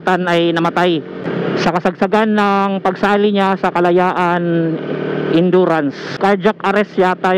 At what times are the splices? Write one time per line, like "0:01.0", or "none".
0:01.2
0:06.2